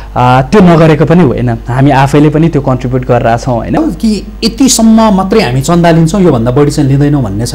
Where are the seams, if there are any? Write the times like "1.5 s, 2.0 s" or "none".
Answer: 3.8 s